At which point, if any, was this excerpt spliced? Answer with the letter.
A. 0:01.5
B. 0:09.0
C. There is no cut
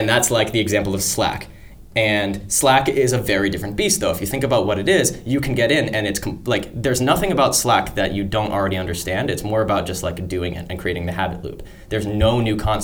C